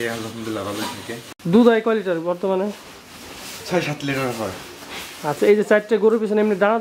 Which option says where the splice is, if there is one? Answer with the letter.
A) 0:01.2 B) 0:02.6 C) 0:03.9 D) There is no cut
A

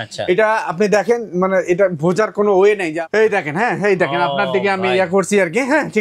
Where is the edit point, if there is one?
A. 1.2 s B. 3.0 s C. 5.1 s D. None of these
B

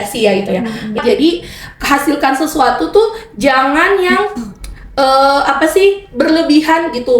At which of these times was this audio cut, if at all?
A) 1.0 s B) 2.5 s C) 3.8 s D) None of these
A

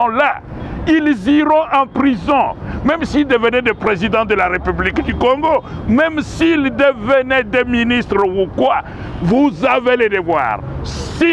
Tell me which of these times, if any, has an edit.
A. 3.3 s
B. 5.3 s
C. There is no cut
C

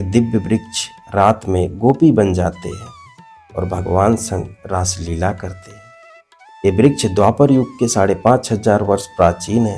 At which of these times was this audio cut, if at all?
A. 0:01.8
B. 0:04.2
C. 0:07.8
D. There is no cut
D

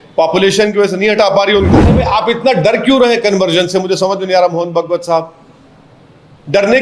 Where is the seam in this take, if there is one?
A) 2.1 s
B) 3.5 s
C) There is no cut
A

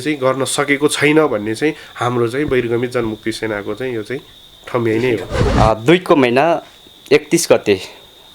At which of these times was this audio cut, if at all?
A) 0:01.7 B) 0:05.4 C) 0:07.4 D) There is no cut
B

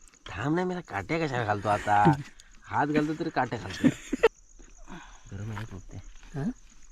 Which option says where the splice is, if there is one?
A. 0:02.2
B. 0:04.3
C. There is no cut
B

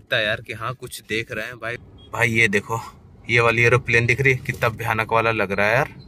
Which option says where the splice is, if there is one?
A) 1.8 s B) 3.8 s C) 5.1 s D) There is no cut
A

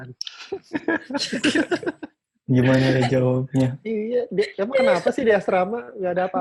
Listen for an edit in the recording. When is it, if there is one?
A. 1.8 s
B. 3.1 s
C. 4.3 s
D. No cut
D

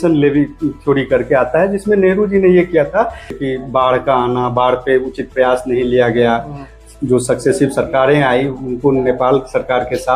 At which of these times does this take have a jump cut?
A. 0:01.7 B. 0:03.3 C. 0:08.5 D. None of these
B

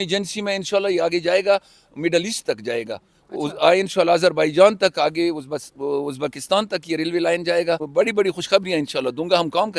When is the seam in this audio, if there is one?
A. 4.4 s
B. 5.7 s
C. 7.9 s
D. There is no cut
C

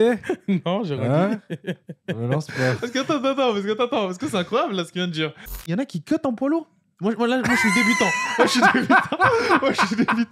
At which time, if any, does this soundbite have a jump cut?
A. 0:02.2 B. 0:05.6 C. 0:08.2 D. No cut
B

